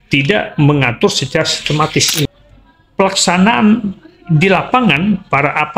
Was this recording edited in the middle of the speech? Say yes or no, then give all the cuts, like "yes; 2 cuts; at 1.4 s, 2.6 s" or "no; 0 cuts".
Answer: yes; 1 cut; at 2.3 s